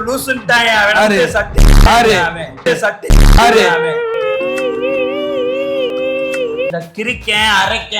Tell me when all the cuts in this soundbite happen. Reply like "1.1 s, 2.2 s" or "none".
6.8 s